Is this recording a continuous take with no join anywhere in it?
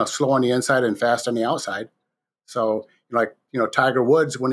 yes; 0 cuts

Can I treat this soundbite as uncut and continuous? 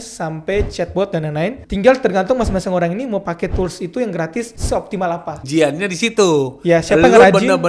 no; 2 cuts; at 1.6 s, 4.8 s

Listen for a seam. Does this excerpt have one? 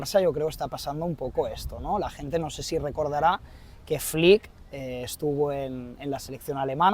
no; 0 cuts

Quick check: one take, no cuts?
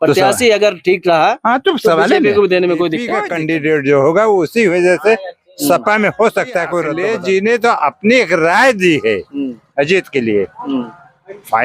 no; 2 cuts; at 3.2 s, 6.9 s

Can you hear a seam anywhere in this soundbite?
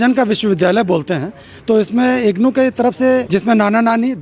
yes; 1 cut; at 3.3 s

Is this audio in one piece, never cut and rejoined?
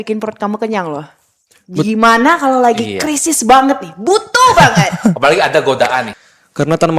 no; 1 cut; at 6.1 s

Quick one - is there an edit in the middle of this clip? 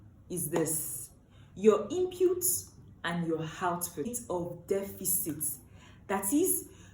yes; 1 cut; at 4.2 s

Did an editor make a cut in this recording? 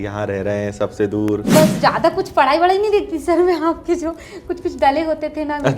yes; 1 cut; at 1.5 s

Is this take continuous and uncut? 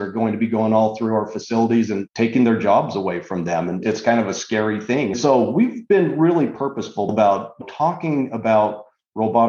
no; 2 cuts; at 5.1 s, 7.1 s

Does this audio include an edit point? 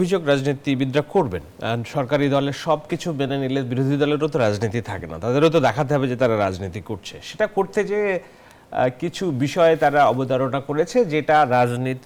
no; 0 cuts

